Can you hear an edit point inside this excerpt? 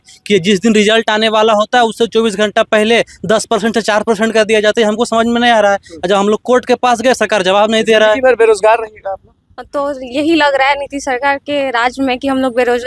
no; 0 cuts

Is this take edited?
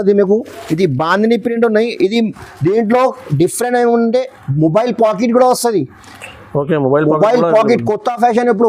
no; 0 cuts

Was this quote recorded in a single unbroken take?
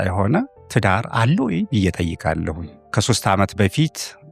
no; 1 cut; at 2.9 s

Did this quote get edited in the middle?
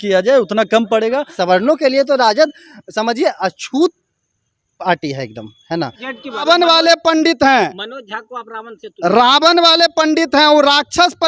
yes; 2 cuts; at 1.4 s, 6.4 s

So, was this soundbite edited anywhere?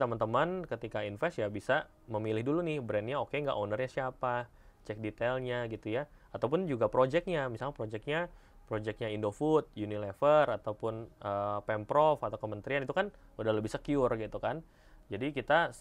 no; 0 cuts

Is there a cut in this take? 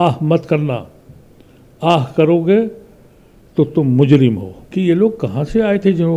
yes; 1 cut; at 4.5 s

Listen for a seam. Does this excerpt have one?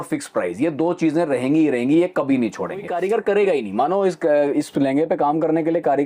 yes; 1 cut; at 2.2 s

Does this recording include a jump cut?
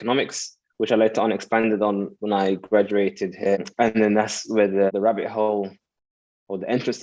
yes; 2 cuts; at 3.6 s, 4.9 s

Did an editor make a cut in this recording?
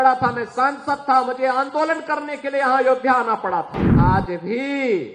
yes; 1 cut; at 3.8 s

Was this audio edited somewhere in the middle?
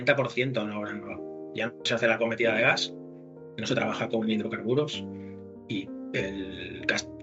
no; 0 cuts

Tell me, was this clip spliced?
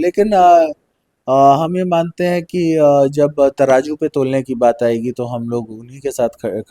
no; 0 cuts

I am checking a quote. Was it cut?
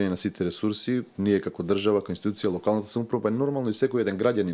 no; 0 cuts

